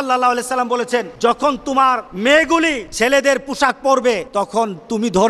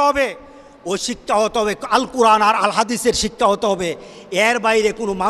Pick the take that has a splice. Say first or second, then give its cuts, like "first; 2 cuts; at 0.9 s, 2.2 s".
first; 4 cuts; at 1.1 s, 2.1 s, 2.8 s, 4.3 s